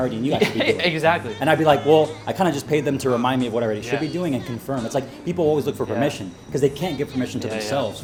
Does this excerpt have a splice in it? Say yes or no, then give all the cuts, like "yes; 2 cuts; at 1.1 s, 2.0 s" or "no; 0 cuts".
no; 0 cuts